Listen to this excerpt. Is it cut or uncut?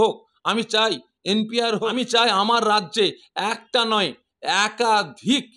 cut